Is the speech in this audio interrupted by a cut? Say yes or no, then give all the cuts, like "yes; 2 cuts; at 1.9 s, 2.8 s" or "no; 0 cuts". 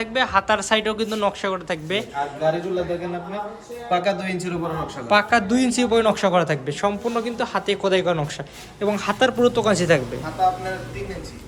no; 0 cuts